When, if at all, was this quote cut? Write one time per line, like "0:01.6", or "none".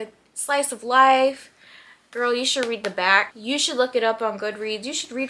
0:03.3